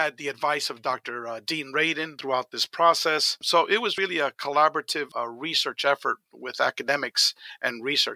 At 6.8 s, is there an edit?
no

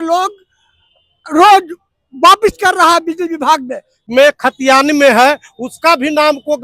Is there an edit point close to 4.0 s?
yes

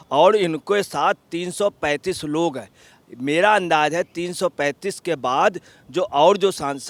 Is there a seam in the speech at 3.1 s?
no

